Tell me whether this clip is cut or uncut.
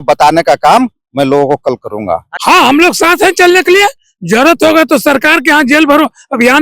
cut